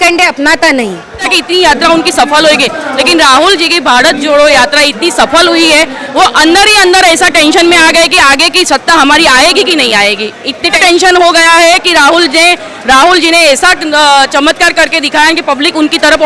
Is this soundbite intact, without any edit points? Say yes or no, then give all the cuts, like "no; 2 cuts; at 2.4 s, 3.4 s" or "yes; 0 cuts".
no; 2 cuts; at 1.3 s, 10.8 s